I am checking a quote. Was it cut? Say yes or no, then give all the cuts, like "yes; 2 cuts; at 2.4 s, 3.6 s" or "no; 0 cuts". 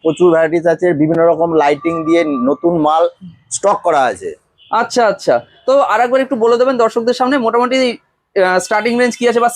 no; 0 cuts